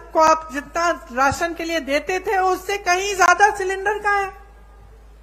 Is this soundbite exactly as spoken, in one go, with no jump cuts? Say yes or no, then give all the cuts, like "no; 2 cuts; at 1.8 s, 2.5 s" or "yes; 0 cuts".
yes; 0 cuts